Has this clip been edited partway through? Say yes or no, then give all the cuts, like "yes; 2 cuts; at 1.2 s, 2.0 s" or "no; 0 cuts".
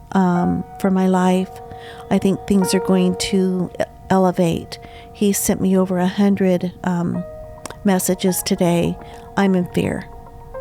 no; 0 cuts